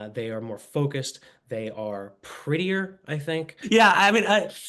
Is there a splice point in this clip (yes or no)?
yes